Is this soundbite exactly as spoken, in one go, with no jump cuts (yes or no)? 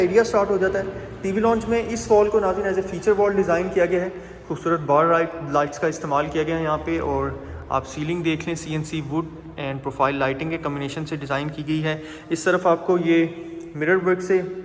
yes